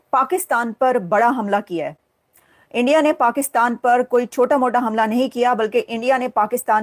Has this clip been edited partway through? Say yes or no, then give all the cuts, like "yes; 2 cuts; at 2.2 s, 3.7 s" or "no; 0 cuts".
no; 0 cuts